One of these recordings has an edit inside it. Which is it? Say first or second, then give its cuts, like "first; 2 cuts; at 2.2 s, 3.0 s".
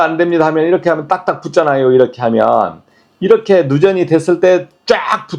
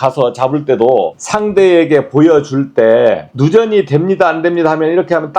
second; 2 cuts; at 1.2 s, 3.3 s